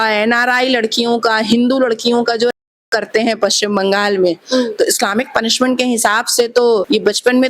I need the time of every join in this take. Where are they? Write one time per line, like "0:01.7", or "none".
none